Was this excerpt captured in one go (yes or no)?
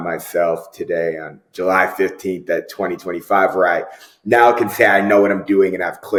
yes